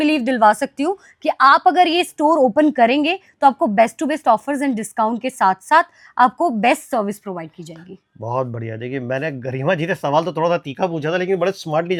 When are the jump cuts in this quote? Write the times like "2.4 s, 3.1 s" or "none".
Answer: none